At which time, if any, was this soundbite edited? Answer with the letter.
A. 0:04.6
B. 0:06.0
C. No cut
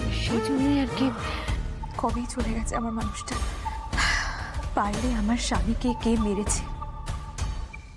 A